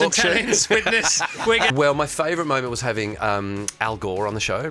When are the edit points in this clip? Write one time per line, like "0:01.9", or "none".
0:01.7

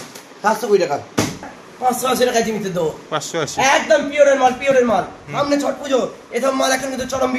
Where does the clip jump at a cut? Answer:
0:01.6

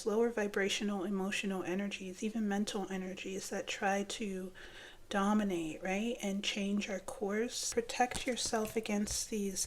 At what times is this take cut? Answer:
0:07.6

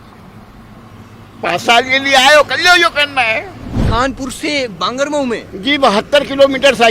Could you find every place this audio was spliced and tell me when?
0:03.8

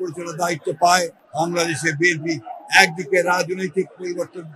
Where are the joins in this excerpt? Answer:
0:01.2

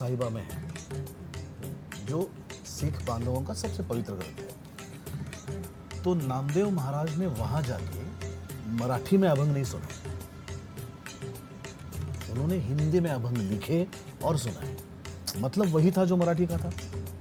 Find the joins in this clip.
none

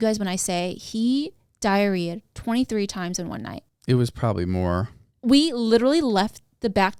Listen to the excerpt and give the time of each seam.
none

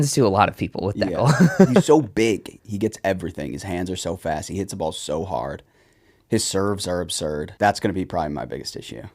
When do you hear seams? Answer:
0:07.5

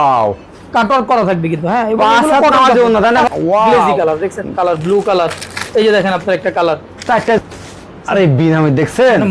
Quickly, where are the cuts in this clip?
0:03.3
0:07.4

